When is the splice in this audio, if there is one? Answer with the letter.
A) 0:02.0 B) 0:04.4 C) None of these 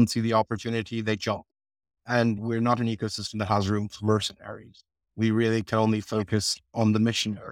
C